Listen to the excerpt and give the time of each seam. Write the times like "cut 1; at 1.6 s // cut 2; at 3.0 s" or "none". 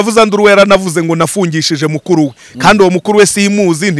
none